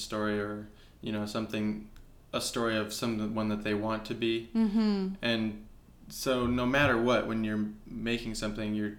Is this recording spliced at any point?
no; 0 cuts

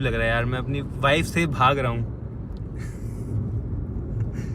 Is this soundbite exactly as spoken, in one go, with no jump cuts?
yes; 0 cuts

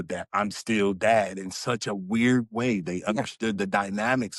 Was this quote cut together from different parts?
no; 0 cuts

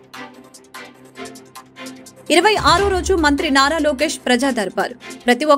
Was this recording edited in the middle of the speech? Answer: no; 0 cuts

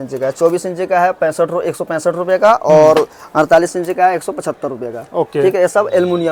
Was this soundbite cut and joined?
no; 0 cuts

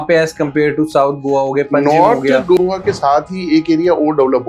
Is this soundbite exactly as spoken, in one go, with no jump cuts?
no; 1 cut; at 2.6 s

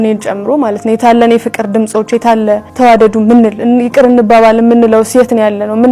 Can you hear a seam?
yes; 1 cut; at 2.7 s

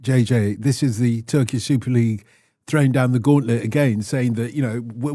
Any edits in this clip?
no; 0 cuts

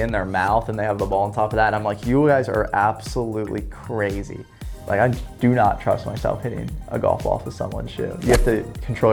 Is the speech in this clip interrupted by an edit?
no; 0 cuts

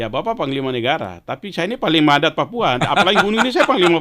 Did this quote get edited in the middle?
no; 0 cuts

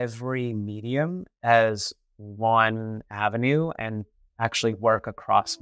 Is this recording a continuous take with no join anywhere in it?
yes; 0 cuts

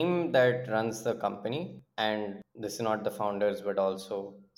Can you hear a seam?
yes; 2 cuts; at 1.8 s, 2.5 s

